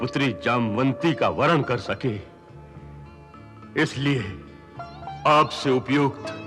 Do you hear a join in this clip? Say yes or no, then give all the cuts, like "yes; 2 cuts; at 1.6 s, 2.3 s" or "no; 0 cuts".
no; 0 cuts